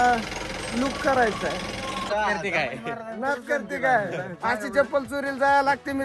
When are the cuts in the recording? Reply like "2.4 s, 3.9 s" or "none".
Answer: 2.1 s